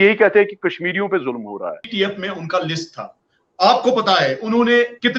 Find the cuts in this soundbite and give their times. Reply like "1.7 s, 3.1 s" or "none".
1.9 s